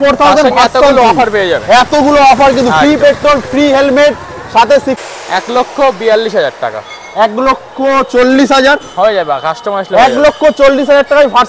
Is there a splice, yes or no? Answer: yes